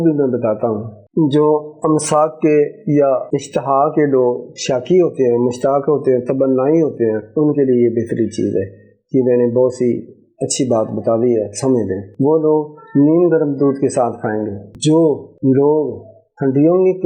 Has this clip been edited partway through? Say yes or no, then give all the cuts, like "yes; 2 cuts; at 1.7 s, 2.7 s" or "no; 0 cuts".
yes; 2 cuts; at 1.0 s, 3.3 s